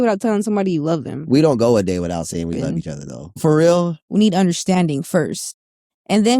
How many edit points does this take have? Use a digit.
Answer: 1